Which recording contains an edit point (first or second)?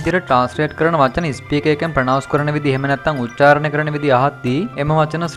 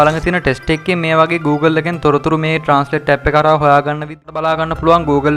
second